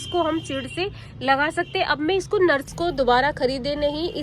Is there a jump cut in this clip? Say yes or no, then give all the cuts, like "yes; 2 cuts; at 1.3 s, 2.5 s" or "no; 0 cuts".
yes; 1 cut; at 2.7 s